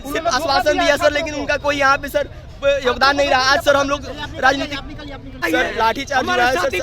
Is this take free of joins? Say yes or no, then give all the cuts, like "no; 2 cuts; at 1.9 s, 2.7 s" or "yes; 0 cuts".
no; 1 cut; at 5.4 s